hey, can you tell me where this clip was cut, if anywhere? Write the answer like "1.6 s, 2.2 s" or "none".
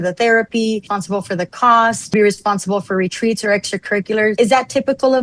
1.0 s, 2.1 s, 4.3 s